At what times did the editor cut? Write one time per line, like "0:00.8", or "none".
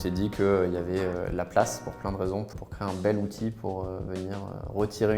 0:02.5

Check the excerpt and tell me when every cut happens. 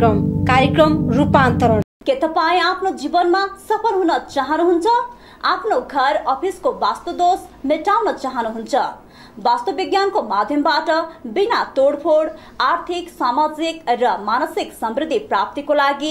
0:01.9

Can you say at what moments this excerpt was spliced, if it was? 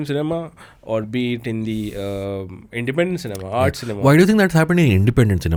none

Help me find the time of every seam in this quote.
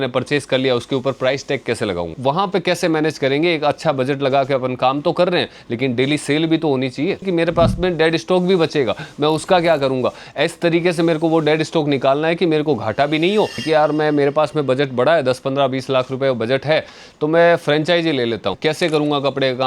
0:02.2
0:07.3
0:13.6
0:18.6

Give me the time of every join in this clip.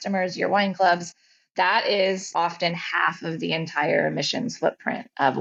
none

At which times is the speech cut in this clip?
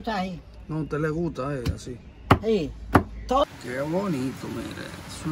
0:03.5

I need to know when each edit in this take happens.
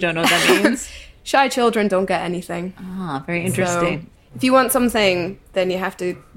0:04.0

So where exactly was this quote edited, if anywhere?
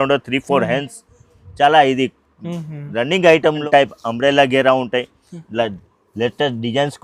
0:03.6

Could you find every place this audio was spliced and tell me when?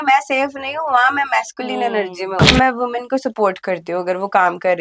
0:02.5

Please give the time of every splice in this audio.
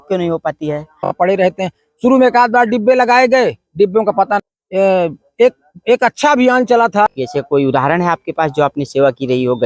0:01.1
0:04.6
0:07.1

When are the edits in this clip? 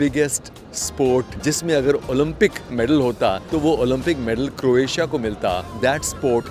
0:01.3
0:03.4
0:05.7

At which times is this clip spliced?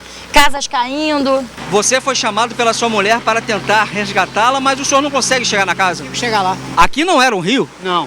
0:01.5
0:06.7

